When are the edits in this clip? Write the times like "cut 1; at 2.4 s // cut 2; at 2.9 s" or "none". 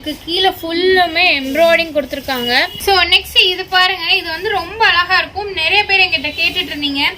cut 1; at 2.8 s